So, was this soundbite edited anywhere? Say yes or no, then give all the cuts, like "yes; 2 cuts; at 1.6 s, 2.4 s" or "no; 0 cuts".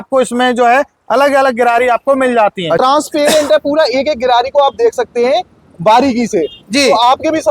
yes; 1 cut; at 2.8 s